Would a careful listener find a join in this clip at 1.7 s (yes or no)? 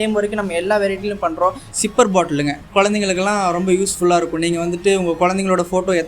yes